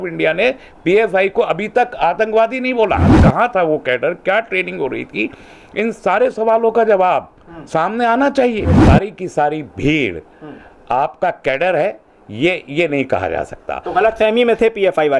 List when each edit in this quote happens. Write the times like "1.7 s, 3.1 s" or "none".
3.1 s, 8.8 s